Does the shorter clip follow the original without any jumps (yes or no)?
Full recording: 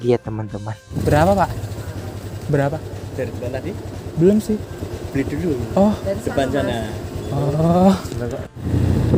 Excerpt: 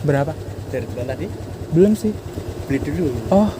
yes